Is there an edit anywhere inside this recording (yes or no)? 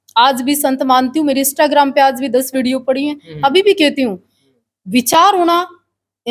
no